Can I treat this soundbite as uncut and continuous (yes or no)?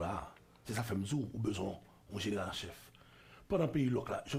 yes